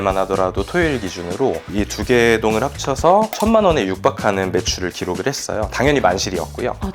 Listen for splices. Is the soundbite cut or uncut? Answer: uncut